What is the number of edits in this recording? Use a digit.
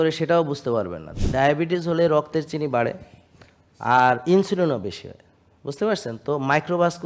1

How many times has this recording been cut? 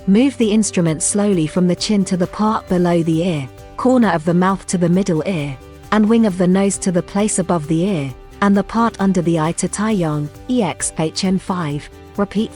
0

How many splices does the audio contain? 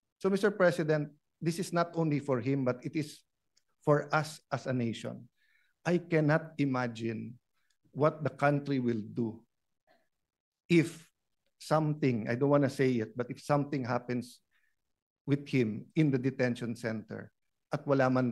0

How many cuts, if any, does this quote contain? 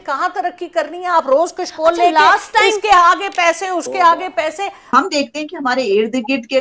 1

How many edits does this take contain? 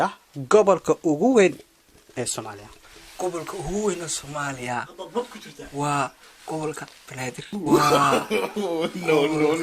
1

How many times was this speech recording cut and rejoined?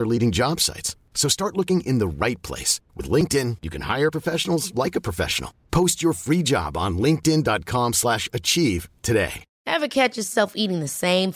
1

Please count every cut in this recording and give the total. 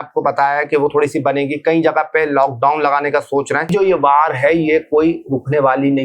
1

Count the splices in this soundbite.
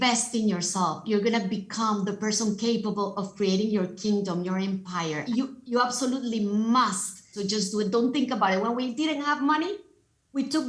0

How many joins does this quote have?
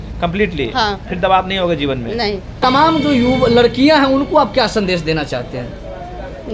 1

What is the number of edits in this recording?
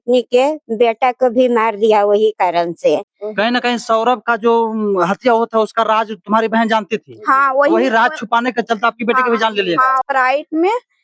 2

